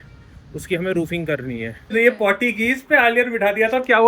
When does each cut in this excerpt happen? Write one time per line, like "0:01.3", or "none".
0:01.9